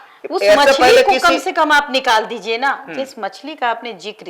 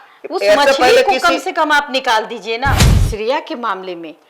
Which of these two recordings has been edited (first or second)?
second